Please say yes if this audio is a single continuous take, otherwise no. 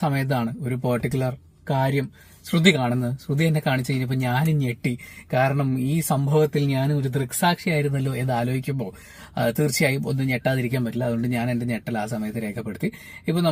yes